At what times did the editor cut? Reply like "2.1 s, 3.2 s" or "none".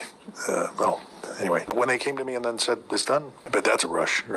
1.7 s, 3.4 s